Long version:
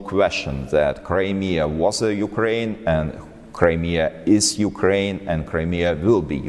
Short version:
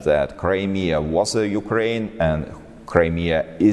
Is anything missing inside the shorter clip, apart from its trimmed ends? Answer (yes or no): no